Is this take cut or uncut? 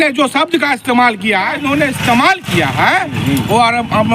cut